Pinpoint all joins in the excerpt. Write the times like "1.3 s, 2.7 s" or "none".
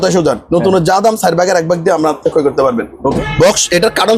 3.2 s